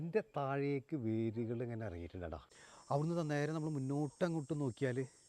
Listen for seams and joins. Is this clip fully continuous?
no; 1 cut; at 2.5 s

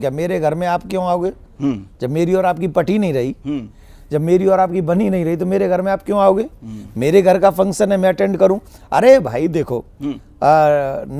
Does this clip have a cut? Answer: no; 0 cuts

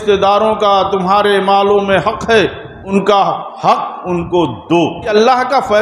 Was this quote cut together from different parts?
yes; 2 cuts; at 2.9 s, 5.1 s

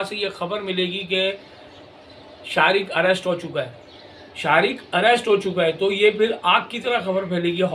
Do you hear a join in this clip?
no; 0 cuts

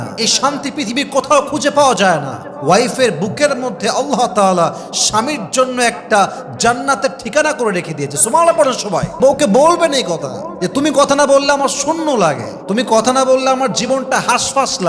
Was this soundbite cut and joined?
yes; 1 cut; at 9.2 s

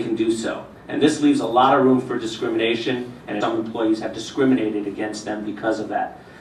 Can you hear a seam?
no; 0 cuts

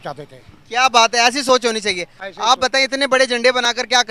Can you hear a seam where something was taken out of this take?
no; 0 cuts

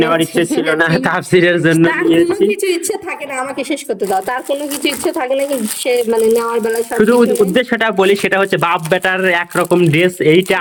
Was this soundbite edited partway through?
no; 0 cuts

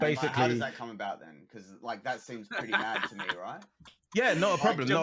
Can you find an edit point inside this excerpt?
no; 0 cuts

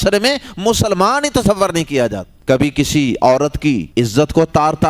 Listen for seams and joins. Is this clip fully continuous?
no; 2 cuts; at 2.3 s, 3.9 s

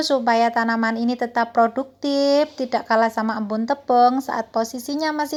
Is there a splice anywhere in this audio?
no; 0 cuts

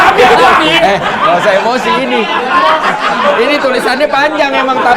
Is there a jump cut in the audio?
no; 0 cuts

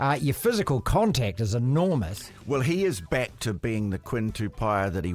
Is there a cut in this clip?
no; 0 cuts

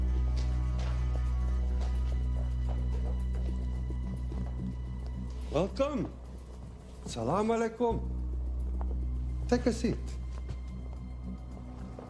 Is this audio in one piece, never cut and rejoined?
no; 1 cut; at 10.4 s

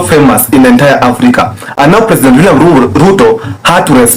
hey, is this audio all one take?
yes; 0 cuts

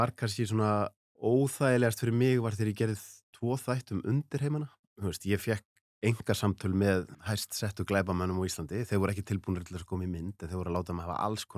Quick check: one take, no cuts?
no; 3 cuts; at 1.0 s, 4.8 s, 7.2 s

